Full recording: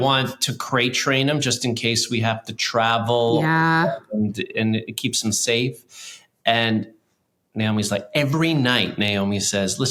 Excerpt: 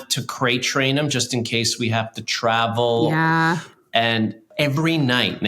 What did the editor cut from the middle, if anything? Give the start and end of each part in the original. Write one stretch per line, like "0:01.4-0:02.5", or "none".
0:03.9-0:06.1
0:07.0-0:08.1